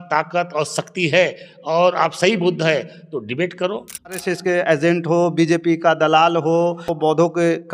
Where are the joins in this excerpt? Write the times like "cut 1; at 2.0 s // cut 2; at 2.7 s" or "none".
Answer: cut 1; at 4.2 s // cut 2; at 6.9 s